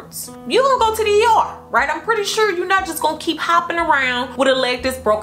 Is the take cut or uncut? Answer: cut